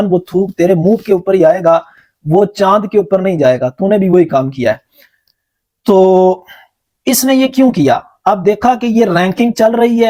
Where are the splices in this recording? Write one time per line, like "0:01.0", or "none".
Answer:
none